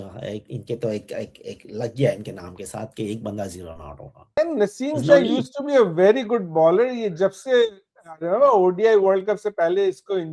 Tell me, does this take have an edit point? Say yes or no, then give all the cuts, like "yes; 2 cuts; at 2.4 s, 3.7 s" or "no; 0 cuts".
yes; 1 cut; at 4.4 s